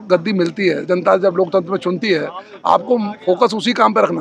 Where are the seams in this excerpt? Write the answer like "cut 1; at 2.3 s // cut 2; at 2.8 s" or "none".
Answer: none